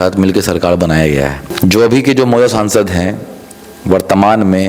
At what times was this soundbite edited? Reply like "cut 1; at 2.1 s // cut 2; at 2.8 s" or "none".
cut 1; at 1.4 s